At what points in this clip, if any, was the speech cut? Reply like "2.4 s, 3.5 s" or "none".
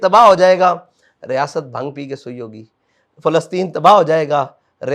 none